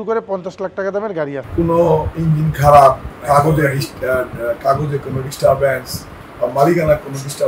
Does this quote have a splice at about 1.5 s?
yes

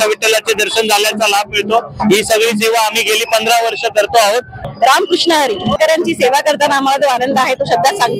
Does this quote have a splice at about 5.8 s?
yes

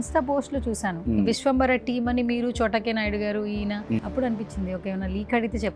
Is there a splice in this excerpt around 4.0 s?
yes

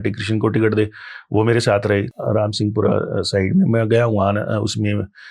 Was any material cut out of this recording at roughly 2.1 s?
yes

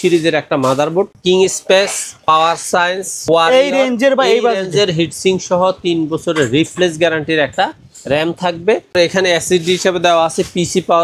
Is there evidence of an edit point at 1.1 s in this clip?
yes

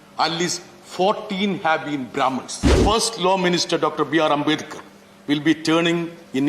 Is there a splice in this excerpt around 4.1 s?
no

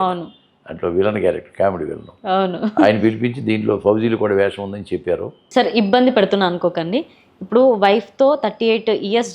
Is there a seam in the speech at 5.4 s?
yes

